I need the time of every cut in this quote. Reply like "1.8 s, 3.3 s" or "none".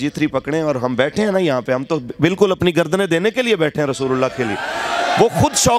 none